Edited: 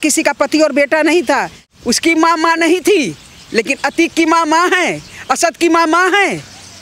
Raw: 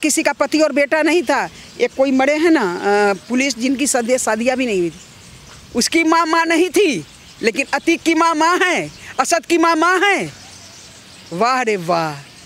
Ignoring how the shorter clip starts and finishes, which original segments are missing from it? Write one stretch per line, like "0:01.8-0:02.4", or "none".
0:01.6-0:05.5